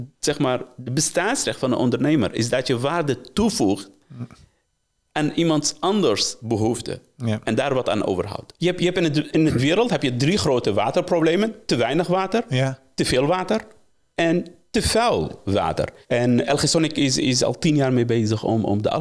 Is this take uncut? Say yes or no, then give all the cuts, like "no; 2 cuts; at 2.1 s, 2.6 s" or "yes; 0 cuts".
no; 2 cuts; at 8.5 s, 16.0 s